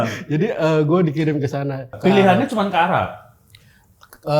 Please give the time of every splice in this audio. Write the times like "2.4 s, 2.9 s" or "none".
1.9 s